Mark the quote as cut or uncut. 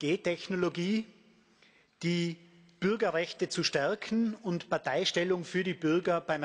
uncut